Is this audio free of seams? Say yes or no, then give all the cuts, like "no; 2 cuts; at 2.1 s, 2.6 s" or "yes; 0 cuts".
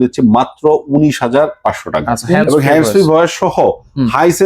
no; 1 cut; at 2.4 s